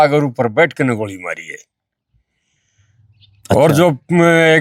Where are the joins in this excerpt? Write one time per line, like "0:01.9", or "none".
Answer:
none